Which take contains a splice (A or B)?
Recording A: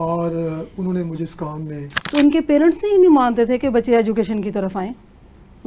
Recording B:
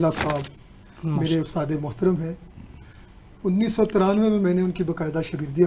A